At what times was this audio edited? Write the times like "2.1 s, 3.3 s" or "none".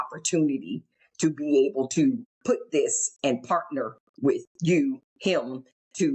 2.3 s, 5.1 s